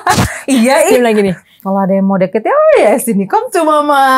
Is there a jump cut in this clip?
yes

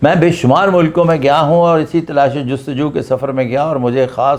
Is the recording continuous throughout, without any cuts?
yes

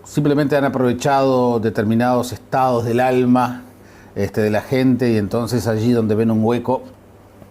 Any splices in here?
yes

